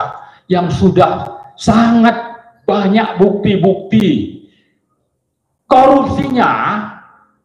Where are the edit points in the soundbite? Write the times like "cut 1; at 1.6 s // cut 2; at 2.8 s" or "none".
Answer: none